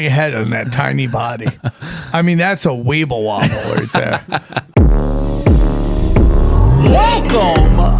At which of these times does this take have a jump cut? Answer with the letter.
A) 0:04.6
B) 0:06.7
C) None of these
A